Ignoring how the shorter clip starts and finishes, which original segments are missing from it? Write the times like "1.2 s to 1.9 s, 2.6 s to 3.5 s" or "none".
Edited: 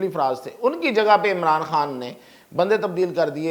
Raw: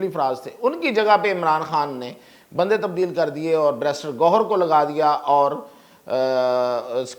none